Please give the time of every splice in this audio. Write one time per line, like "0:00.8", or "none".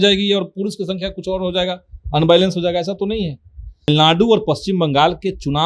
0:03.9